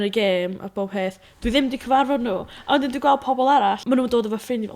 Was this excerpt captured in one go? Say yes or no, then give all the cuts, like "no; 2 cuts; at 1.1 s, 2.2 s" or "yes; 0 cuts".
no; 1 cut; at 3.8 s